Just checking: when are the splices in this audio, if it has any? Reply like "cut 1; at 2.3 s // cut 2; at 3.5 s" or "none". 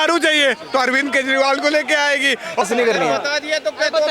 cut 1; at 2.6 s